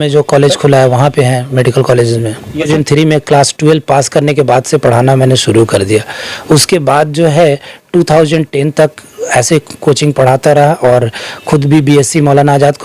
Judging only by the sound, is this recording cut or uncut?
cut